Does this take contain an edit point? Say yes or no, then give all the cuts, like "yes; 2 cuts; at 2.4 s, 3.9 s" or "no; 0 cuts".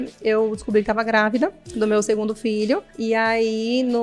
yes; 2 cuts; at 1.6 s, 2.9 s